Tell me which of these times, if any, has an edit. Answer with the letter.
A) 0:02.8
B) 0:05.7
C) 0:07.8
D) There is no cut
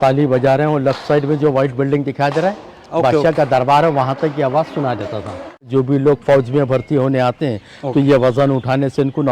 B